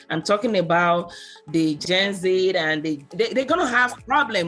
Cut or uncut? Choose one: cut